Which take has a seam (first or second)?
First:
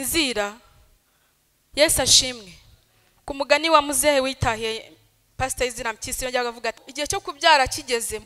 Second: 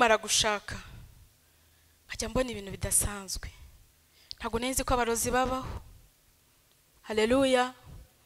first